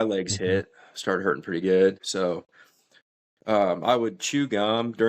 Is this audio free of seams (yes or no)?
no